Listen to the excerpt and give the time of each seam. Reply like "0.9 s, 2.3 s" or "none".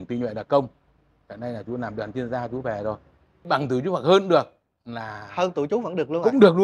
3.4 s